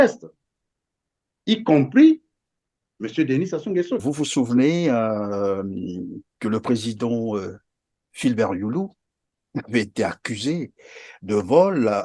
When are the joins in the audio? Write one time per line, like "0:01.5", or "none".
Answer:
0:04.0